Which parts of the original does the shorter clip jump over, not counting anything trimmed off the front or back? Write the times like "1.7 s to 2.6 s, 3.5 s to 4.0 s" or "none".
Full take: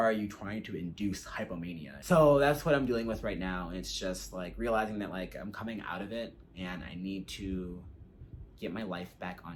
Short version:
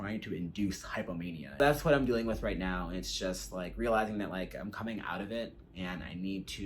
2.0 s to 2.4 s